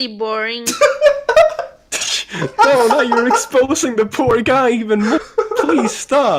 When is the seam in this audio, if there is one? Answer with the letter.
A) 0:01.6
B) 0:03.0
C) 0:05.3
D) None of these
D